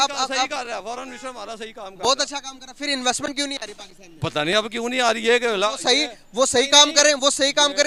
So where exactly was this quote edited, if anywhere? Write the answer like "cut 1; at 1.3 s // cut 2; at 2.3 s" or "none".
none